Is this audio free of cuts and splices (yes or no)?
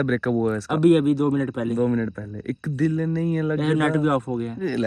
yes